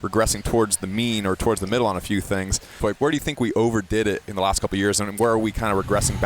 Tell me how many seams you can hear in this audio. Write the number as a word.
one